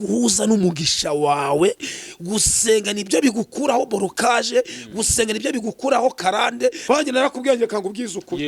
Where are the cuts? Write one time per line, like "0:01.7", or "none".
0:06.8